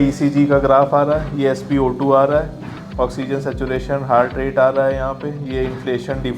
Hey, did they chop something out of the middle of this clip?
no; 0 cuts

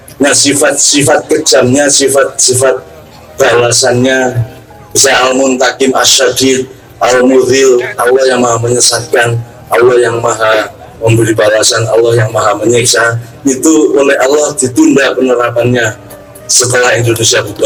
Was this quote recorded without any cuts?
yes; 0 cuts

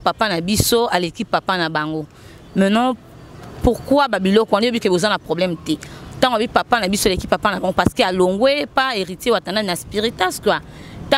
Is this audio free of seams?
yes; 0 cuts

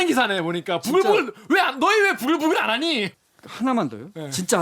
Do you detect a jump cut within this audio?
yes; 1 cut; at 3.1 s

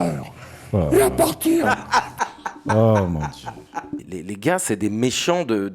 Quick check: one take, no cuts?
no; 1 cut; at 4.0 s

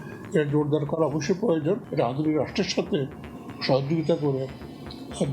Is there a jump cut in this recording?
yes; 1 cut; at 1.9 s

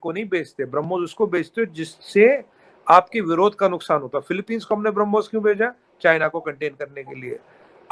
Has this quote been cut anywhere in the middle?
no; 0 cuts

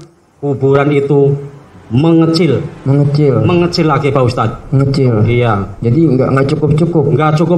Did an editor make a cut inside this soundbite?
no; 0 cuts

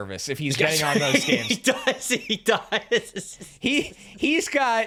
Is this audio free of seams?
yes; 0 cuts

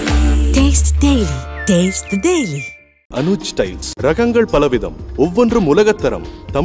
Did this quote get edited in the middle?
no; 0 cuts

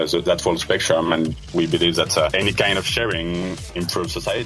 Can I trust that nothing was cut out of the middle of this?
no; 2 cuts; at 2.3 s, 3.6 s

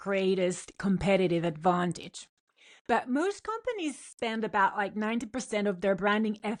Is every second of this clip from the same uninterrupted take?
yes; 0 cuts

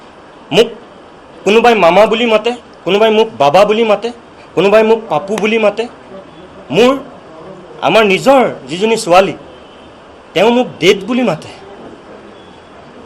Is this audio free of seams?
yes; 0 cuts

